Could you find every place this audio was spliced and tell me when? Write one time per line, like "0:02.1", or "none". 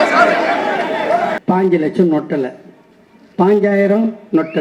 0:01.4